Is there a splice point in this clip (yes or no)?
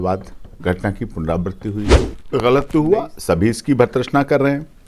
yes